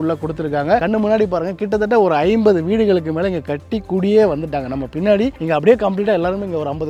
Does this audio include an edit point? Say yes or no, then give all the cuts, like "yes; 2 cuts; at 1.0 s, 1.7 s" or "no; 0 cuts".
no; 0 cuts